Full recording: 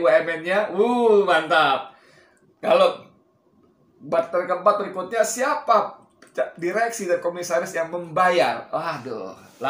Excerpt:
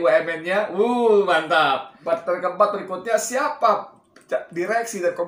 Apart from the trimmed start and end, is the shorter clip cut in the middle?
yes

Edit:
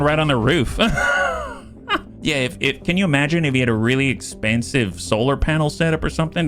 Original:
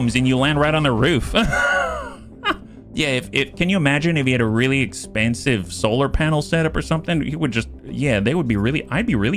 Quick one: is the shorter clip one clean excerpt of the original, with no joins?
no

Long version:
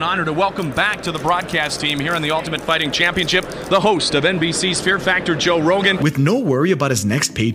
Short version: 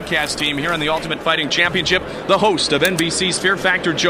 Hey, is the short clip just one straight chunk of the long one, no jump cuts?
yes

